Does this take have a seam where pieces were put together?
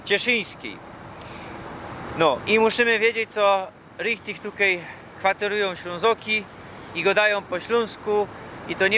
no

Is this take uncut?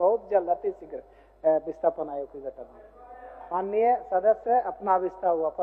yes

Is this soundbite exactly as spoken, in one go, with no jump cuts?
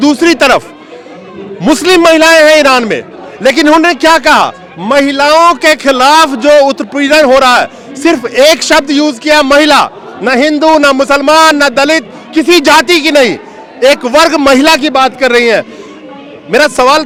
yes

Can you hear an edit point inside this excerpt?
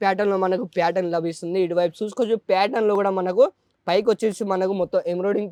no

